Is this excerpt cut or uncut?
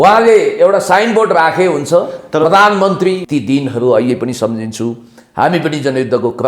cut